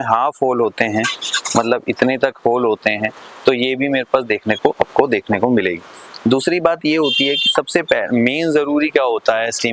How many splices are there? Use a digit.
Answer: 0